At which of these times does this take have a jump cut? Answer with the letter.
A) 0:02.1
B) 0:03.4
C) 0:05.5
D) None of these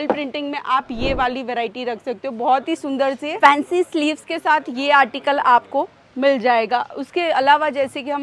D